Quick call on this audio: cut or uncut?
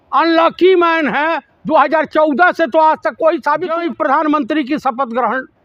cut